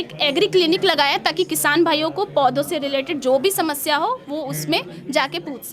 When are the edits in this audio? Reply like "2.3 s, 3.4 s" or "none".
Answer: none